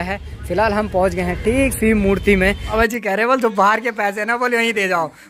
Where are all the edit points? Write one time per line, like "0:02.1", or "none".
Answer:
0:02.7